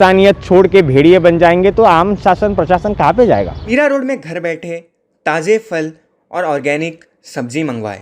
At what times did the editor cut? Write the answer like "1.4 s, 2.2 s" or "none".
3.6 s